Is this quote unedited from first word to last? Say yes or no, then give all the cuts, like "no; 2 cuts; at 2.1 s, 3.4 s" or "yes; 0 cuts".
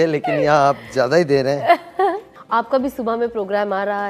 yes; 0 cuts